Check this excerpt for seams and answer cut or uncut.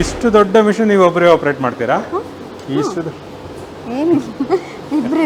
uncut